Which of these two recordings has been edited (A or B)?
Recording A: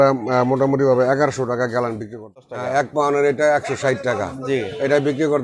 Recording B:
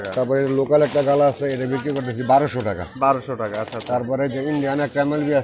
A